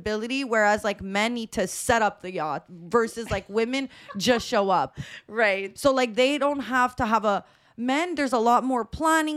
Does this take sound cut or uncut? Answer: uncut